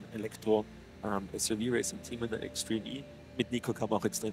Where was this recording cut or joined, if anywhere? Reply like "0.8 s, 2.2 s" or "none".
3.2 s